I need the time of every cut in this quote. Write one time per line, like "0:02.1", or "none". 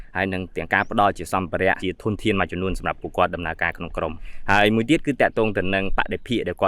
0:01.8
0:04.3

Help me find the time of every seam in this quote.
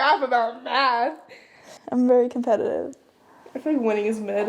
none

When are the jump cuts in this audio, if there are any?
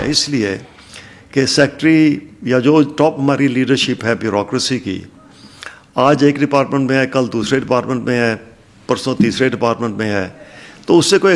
none

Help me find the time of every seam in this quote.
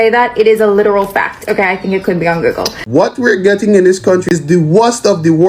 0:02.8
0:04.2

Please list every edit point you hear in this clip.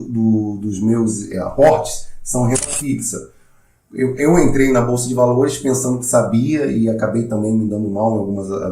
none

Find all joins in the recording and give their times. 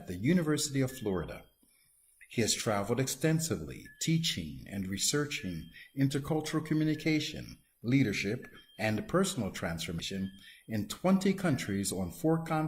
0:10.0

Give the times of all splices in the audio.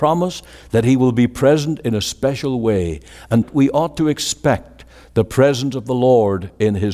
0:03.5

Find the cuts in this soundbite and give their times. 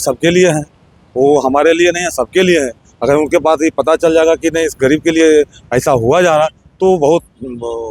none

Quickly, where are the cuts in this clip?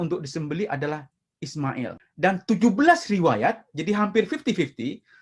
0:02.0

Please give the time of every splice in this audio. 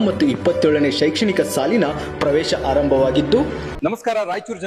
0:03.7

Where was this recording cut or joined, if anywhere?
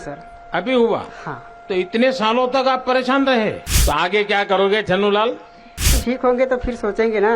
0:03.7
0:05.9

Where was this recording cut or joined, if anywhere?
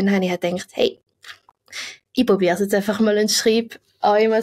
none

